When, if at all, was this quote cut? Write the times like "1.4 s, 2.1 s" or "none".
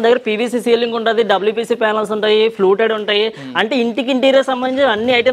none